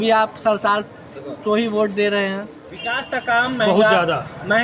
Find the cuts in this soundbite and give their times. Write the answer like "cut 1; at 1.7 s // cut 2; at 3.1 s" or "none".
cut 1; at 3.1 s